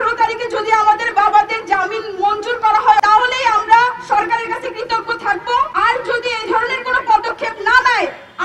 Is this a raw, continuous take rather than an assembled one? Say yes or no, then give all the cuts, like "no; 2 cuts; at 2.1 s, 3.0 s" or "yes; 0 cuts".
no; 2 cuts; at 3.0 s, 5.7 s